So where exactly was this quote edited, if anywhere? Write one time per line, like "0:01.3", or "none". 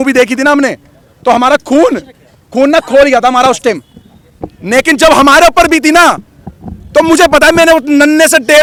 none